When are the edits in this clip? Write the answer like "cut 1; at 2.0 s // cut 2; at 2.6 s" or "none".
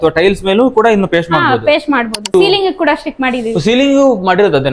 cut 1; at 2.3 s